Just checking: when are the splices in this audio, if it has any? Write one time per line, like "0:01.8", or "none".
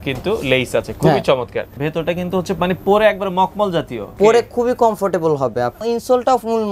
0:01.8
0:04.1
0:05.8